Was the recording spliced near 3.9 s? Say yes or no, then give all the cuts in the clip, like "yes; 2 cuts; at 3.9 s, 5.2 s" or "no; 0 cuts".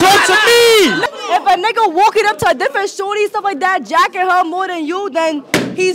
no; 1 cut; at 1.0 s